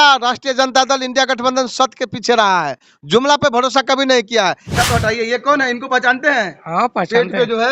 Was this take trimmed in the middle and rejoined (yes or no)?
yes